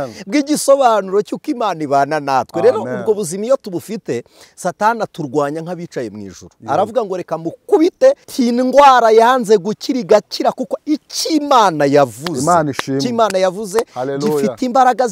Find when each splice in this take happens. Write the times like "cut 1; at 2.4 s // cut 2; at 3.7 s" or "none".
cut 1; at 8.3 s